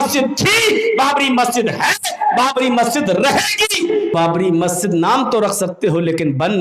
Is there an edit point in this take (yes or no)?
yes